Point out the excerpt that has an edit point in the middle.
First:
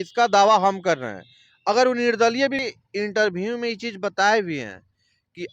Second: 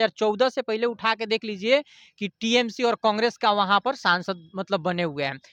first; 1 cut; at 2.6 s

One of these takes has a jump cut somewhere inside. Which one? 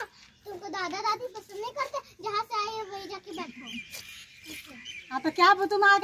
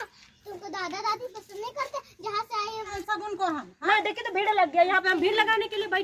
second; 1 cut; at 3.0 s

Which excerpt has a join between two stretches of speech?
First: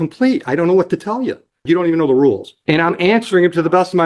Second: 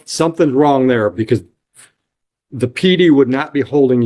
first; 2 cuts; at 1.6 s, 2.5 s

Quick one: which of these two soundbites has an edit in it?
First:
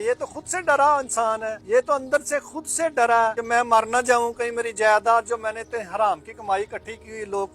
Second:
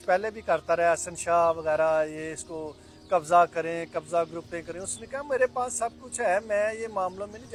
first; 2 cuts; at 1.5 s, 3.4 s

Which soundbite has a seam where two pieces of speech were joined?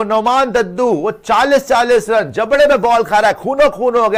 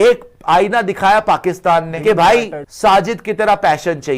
second; 2 cuts; at 1.9 s, 2.6 s

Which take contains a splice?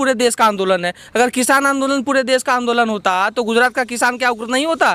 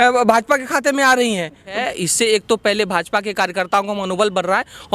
second; 1 cut; at 1.8 s

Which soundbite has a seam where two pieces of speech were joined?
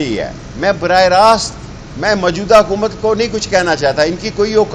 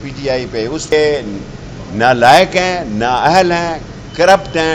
second; 1 cut; at 0.9 s

